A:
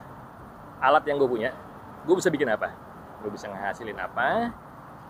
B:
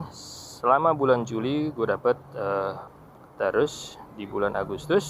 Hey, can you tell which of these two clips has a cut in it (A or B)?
B